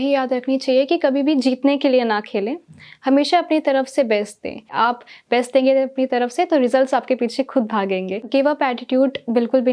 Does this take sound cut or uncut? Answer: cut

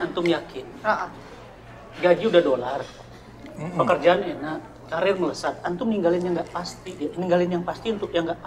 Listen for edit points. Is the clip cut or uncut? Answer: uncut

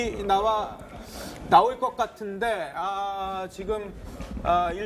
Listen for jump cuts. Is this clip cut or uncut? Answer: uncut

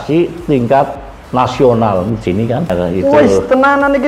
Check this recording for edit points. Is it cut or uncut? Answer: cut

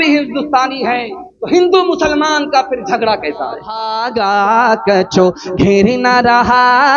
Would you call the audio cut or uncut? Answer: cut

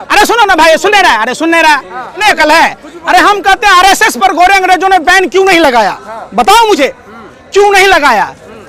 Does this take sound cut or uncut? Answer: cut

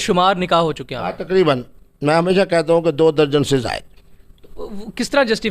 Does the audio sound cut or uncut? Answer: uncut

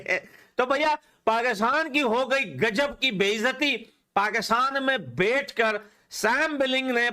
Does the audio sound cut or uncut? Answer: uncut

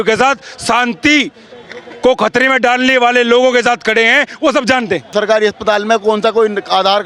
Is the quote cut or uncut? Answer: cut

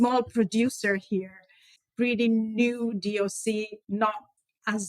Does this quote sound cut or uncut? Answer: cut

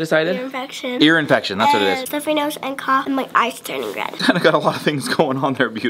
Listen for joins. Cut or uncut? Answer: cut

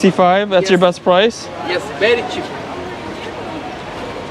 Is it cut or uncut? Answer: uncut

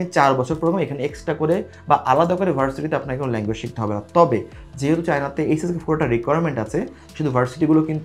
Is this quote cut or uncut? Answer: uncut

